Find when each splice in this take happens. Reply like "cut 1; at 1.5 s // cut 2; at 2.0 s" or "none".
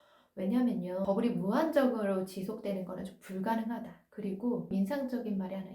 cut 1; at 1.0 s